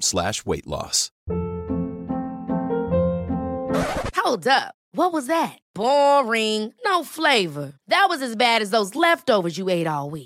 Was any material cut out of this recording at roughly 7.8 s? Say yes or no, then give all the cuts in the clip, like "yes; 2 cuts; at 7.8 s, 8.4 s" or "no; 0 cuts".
no; 1 cut; at 1.1 s